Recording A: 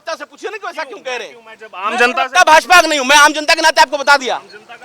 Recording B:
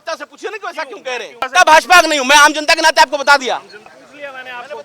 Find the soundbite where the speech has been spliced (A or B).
B